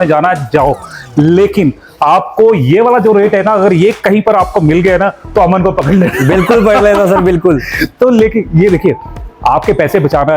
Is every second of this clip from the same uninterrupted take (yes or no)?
yes